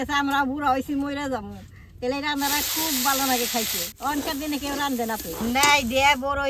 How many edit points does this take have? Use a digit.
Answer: 1